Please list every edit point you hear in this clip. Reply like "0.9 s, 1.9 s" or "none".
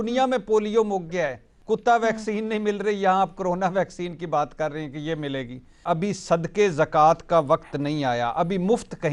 1.5 s, 5.8 s